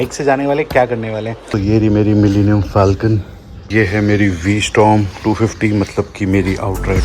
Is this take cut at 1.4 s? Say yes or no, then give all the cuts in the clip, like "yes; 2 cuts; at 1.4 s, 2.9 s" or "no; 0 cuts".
yes; 2 cuts; at 1.4 s, 3.6 s